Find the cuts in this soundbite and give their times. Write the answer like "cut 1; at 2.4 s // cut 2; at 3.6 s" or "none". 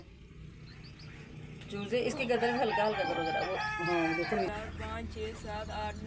cut 1; at 4.5 s

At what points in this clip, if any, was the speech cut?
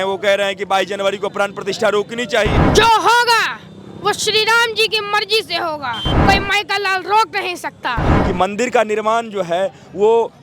cut 1; at 2.6 s // cut 2; at 6.1 s // cut 3; at 8.1 s

